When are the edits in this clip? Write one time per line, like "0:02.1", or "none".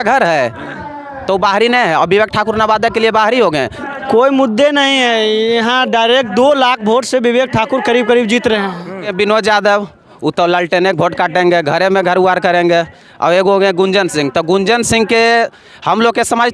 0:03.8
0:09.1